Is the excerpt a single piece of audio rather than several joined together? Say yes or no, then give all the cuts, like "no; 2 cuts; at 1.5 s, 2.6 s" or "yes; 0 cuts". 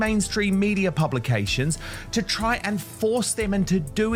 yes; 0 cuts